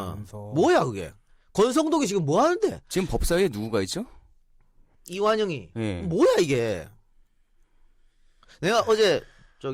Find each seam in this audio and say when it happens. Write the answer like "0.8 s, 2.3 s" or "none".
none